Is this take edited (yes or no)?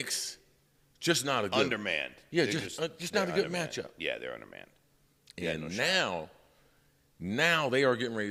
no